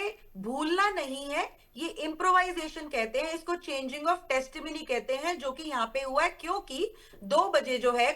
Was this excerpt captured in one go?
yes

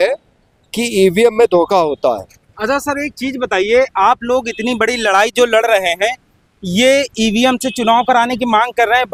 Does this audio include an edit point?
no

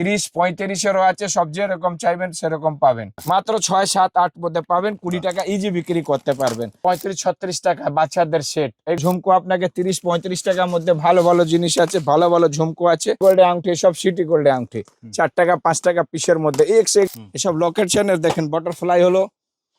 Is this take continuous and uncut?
no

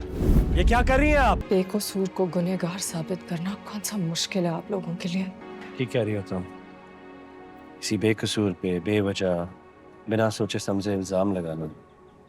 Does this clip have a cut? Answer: yes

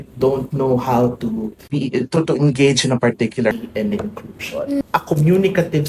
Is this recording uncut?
no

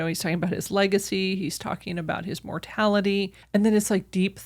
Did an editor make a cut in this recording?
yes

